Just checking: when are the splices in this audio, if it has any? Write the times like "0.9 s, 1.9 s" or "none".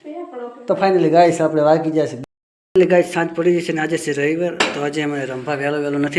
2.2 s